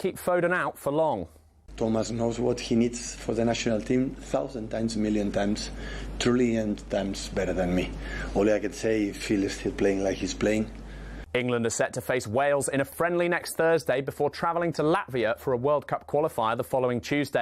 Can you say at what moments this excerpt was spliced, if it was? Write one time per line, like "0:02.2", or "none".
none